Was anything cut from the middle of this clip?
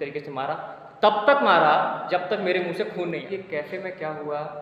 yes; 1 cut; at 3.3 s

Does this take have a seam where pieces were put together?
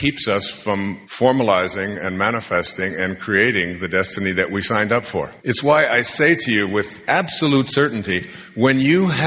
yes; 1 cut; at 5.3 s

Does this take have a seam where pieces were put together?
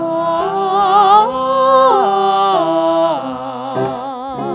no; 0 cuts

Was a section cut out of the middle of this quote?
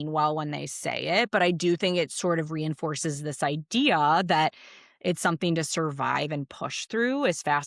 no; 0 cuts

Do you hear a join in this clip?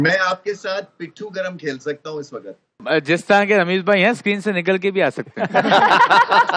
yes; 1 cut; at 2.8 s

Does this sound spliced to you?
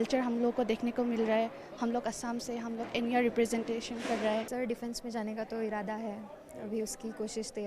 yes; 1 cut; at 4.5 s

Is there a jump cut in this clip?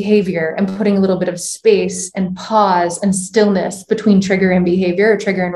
no; 0 cuts

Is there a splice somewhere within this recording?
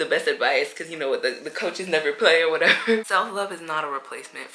yes; 1 cut; at 3.1 s

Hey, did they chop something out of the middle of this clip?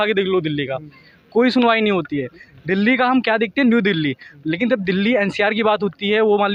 no; 0 cuts

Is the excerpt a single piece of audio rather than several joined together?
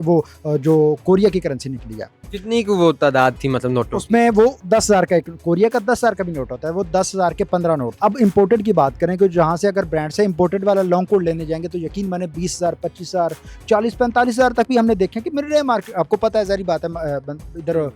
no; 1 cut; at 7.9 s

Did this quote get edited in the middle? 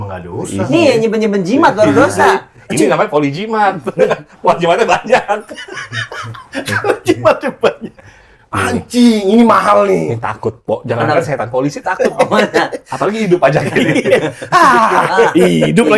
no; 0 cuts

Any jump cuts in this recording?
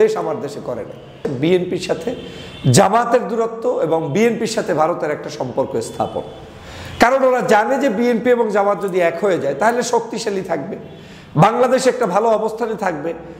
yes; 1 cut; at 1.2 s

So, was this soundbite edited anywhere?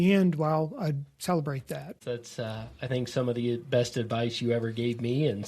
yes; 1 cut; at 2.0 s

